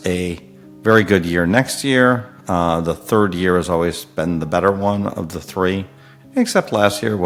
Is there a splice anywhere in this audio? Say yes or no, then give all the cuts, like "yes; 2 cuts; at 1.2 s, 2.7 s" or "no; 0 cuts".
no; 0 cuts